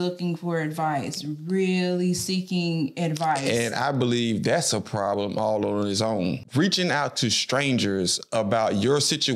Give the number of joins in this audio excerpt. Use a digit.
1